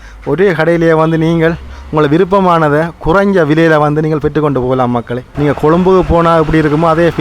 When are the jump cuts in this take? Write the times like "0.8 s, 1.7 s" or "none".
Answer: 5.2 s

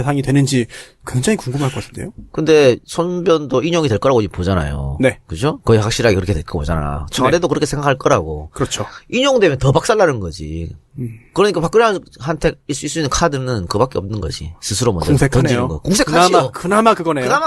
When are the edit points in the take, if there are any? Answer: 5.6 s

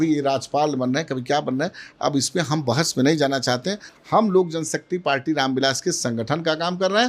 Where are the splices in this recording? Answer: none

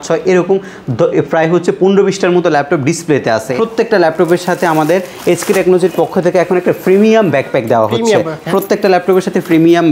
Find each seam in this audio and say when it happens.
3.5 s

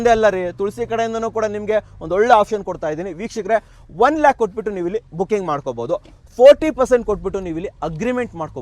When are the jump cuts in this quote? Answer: none

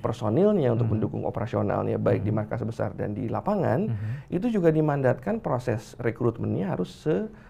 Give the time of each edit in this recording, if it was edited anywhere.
none

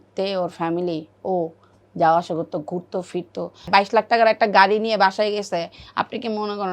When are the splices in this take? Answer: 3.7 s

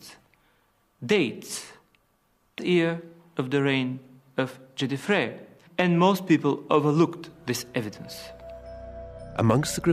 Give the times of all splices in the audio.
2.5 s

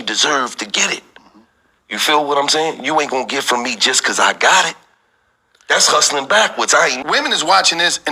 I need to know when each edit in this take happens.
7.0 s

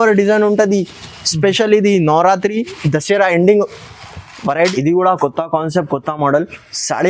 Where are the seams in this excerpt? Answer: 4.7 s

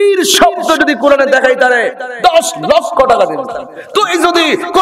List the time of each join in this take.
3.8 s

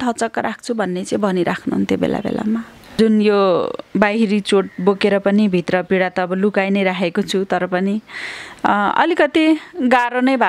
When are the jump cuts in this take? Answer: 3.0 s

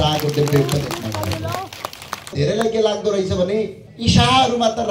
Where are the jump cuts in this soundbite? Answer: 2.3 s, 3.8 s

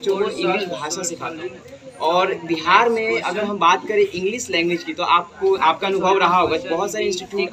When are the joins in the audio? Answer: none

